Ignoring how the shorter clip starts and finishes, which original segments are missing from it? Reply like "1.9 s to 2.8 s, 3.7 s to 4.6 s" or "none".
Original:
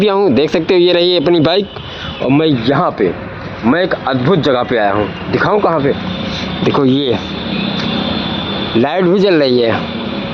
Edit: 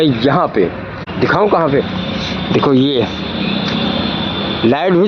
3.5 s to 5.2 s